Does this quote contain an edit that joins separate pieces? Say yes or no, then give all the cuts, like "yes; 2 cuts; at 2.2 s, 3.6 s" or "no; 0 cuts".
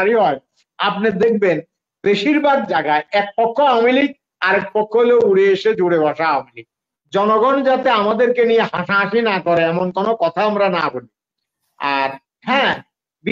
yes; 1 cut; at 6.9 s